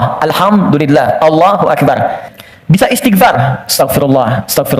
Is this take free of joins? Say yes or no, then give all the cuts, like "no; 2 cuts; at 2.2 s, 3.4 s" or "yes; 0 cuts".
no; 1 cut; at 2.3 s